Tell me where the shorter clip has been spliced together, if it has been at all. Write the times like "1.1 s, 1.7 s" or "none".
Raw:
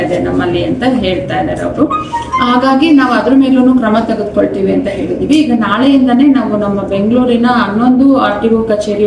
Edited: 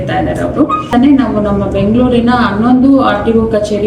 0.9 s